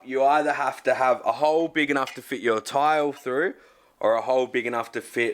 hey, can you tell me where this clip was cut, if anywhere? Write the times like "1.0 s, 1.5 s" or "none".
none